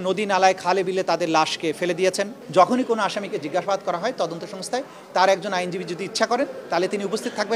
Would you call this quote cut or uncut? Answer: cut